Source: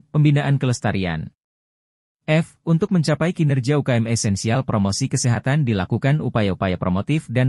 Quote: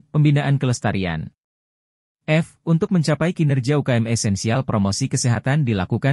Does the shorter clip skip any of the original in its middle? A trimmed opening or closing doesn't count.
no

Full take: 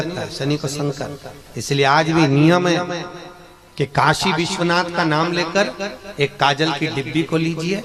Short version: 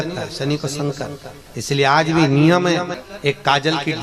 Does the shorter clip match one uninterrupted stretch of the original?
no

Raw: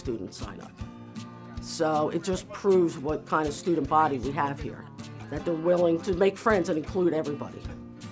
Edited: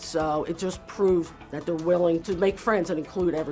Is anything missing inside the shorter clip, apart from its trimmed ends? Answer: yes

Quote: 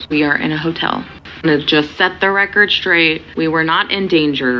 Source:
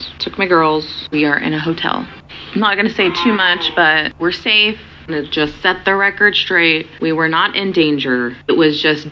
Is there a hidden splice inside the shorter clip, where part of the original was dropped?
yes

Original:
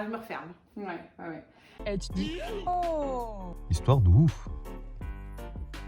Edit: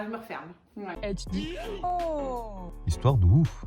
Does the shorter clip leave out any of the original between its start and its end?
yes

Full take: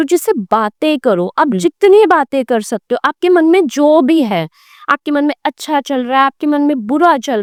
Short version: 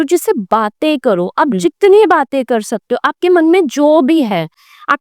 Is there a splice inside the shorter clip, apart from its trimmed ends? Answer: no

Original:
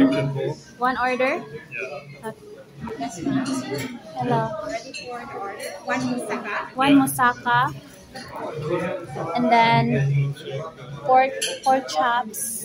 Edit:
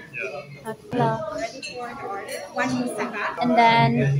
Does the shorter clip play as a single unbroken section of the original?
no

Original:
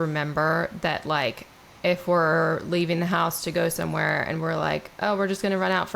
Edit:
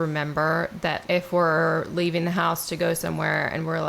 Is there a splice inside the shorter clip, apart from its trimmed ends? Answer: yes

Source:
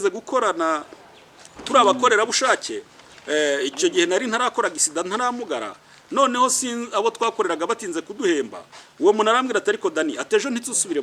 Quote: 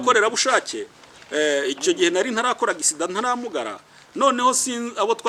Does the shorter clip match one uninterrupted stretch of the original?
yes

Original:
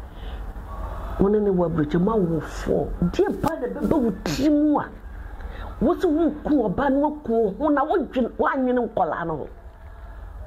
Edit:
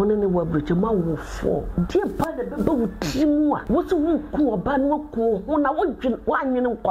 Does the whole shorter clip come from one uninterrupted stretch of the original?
no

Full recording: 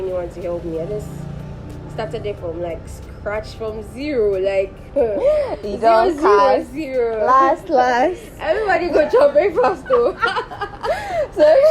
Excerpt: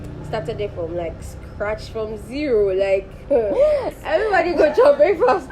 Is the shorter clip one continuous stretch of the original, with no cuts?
no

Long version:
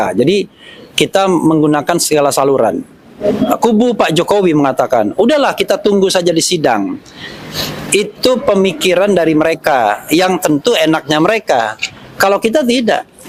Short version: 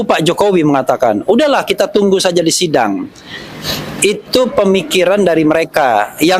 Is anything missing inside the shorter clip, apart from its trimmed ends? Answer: no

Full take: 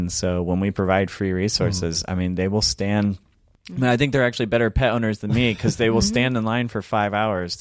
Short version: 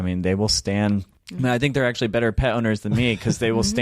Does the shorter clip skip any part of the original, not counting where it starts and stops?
yes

